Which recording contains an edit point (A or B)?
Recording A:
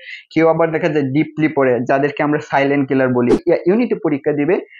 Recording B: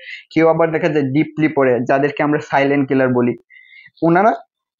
A